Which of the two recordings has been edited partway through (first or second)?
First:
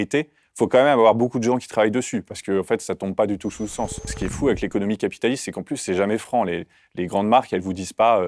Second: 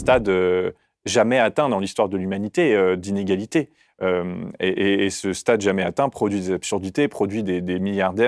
first